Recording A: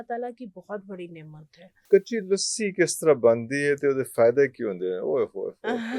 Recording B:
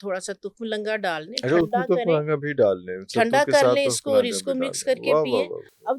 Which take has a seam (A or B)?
A